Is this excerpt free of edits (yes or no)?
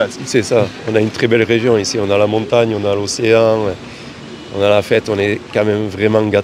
yes